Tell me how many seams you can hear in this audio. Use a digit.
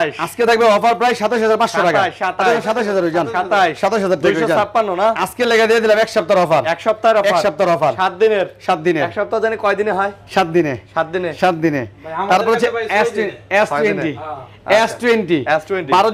0